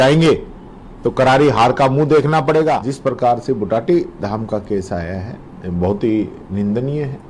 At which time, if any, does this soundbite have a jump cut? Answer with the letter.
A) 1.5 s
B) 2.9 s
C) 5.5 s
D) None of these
B